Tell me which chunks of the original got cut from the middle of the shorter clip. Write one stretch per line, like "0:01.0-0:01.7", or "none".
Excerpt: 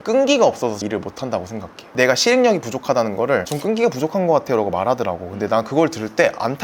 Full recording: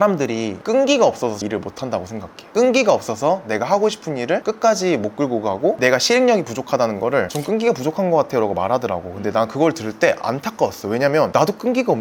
0:02.5-0:05.8